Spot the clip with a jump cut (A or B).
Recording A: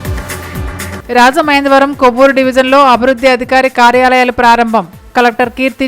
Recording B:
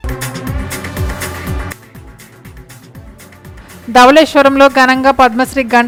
A